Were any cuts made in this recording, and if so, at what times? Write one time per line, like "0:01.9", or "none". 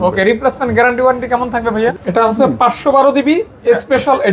0:01.9